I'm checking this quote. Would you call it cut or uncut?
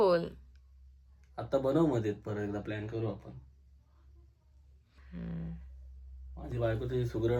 uncut